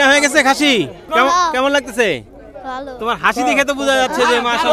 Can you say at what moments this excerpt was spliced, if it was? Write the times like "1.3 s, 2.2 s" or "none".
1.0 s